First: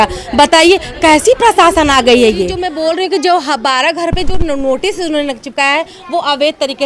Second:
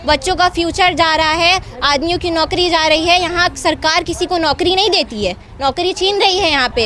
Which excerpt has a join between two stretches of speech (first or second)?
first